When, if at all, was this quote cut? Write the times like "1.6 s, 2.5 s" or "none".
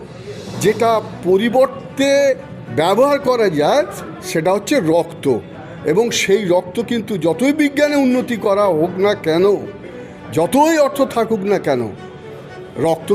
none